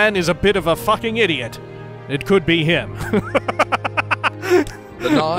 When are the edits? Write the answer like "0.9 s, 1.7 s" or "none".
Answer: 4.3 s

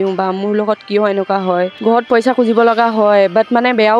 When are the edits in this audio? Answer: 1.8 s

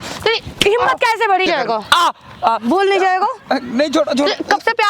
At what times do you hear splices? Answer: 1.5 s

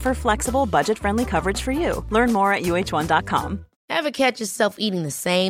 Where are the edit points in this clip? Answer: 3.7 s

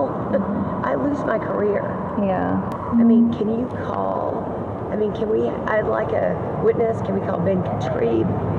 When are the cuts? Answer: 2.7 s

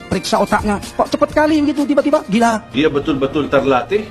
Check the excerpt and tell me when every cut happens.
2.8 s

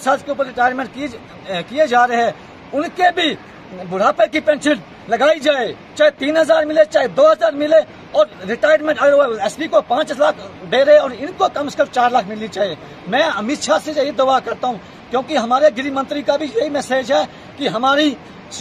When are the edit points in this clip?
none

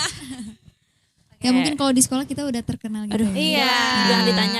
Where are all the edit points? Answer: none

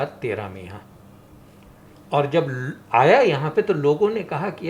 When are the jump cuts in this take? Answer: none

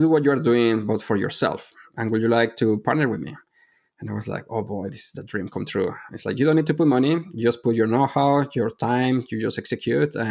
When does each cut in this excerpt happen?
none

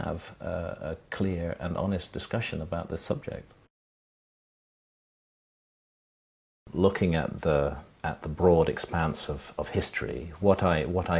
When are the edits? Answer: 1.9 s

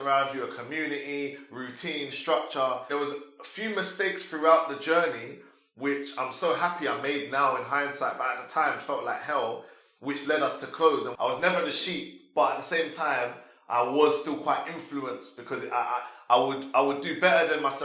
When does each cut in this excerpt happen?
2.9 s, 11.1 s

